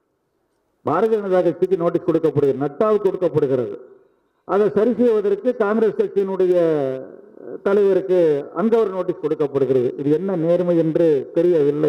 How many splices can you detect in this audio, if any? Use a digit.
0